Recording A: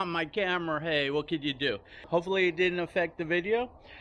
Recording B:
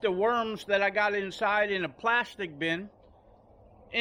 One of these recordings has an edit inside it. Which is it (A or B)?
A